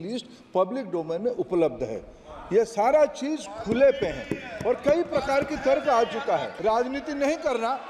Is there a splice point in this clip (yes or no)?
yes